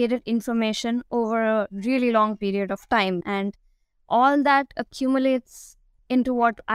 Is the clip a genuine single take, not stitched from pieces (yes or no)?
yes